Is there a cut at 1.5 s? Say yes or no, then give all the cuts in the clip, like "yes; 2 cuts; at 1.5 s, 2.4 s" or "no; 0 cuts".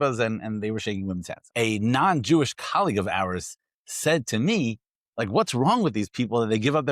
yes; 1 cut; at 1.5 s